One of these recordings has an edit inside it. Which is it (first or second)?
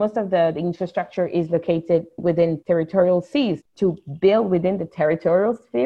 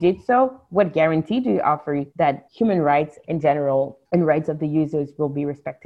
second